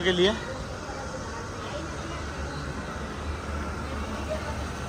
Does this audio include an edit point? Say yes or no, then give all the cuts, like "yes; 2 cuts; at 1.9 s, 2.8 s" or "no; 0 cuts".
no; 0 cuts